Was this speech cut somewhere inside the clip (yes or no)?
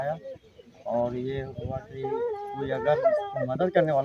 no